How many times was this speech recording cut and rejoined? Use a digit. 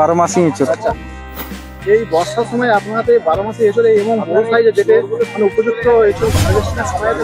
0